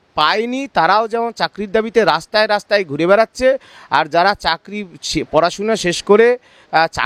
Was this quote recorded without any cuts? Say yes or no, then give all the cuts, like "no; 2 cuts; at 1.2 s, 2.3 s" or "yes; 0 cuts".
yes; 0 cuts